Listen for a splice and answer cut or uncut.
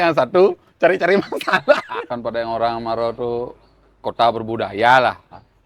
cut